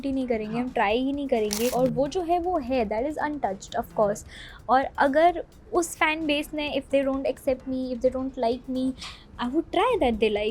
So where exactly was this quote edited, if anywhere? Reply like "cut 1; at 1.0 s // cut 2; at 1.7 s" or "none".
cut 1; at 1.7 s